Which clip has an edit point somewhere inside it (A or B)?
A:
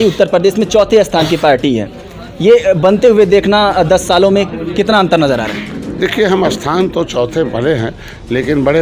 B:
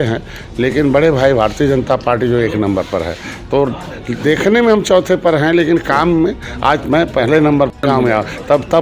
B